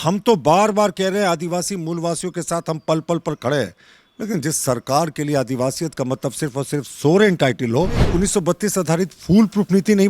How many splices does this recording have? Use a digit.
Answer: 1